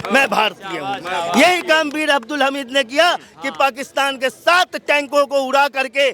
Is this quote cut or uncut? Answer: uncut